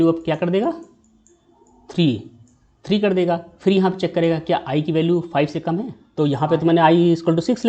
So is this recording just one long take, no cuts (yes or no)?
no